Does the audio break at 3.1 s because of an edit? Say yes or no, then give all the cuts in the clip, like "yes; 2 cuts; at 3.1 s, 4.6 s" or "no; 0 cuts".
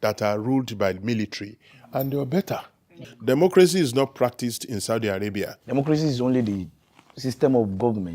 yes; 2 cuts; at 3.1 s, 5.5 s